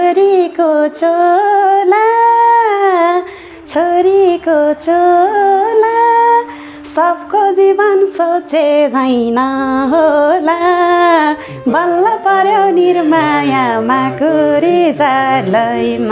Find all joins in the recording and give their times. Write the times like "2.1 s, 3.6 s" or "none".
none